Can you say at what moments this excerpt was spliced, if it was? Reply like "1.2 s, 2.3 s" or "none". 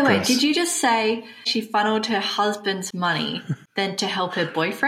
1.5 s, 3.6 s